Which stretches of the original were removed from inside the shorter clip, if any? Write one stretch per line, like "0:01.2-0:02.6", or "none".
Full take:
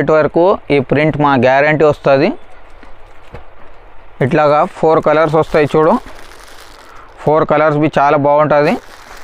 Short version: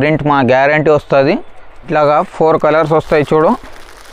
0:02.8-0:04.3